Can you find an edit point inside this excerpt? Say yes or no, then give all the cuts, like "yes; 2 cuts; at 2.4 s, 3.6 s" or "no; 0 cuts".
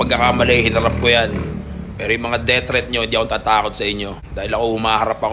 no; 0 cuts